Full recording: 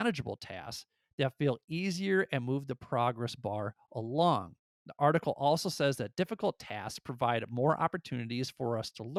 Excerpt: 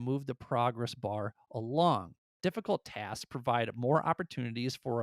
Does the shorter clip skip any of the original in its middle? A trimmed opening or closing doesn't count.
yes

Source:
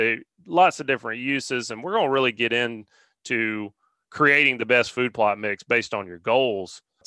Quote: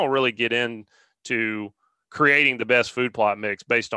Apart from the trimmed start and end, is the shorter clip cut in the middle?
no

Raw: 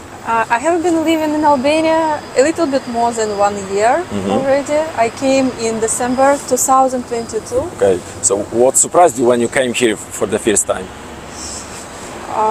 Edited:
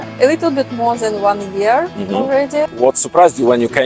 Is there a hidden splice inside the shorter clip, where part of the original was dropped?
yes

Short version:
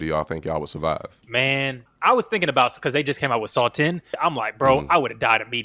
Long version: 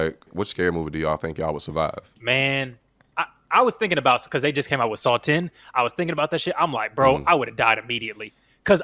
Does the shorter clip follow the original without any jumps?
no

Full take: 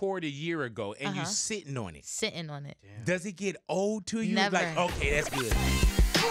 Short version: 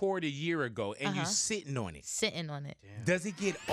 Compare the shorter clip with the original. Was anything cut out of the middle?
no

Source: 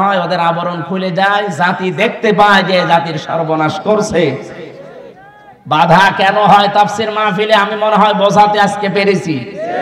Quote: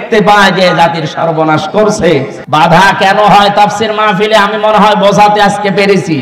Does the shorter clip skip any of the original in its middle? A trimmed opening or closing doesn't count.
yes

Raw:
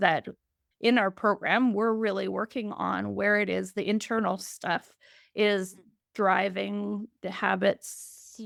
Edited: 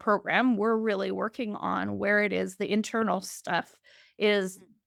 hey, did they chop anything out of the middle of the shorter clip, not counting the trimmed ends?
no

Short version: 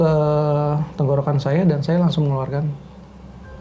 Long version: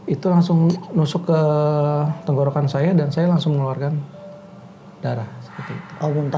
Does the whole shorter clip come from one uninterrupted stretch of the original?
yes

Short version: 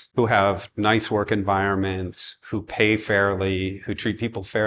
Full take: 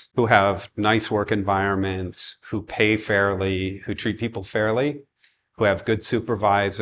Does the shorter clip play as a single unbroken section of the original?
yes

